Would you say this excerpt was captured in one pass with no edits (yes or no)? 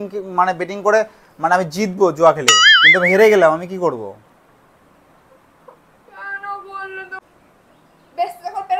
no